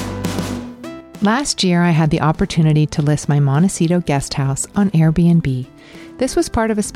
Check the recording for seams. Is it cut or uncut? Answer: cut